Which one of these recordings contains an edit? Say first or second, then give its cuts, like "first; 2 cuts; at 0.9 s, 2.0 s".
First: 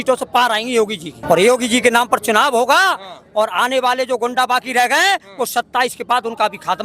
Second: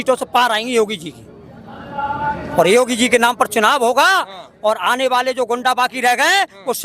first; 1 cut; at 1.2 s